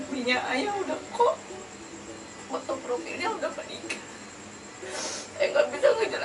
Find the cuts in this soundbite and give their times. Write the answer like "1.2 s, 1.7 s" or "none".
4.8 s